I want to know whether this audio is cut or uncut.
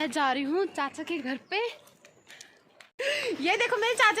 cut